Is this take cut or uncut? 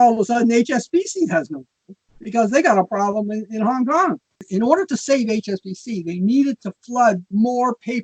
cut